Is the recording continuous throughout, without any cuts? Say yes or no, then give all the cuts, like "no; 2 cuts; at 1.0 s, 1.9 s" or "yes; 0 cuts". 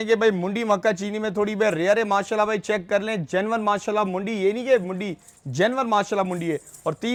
yes; 0 cuts